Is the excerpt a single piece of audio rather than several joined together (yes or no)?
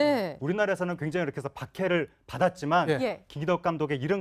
yes